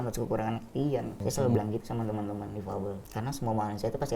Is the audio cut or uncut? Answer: cut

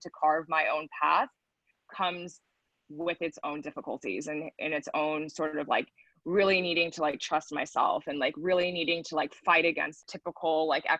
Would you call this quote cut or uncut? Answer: cut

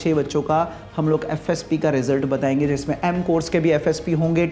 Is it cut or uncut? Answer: uncut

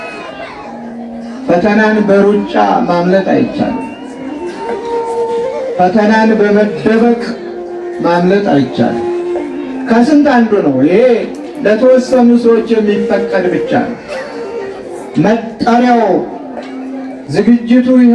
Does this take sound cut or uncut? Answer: uncut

